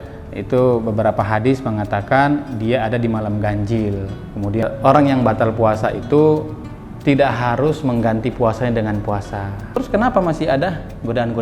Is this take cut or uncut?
cut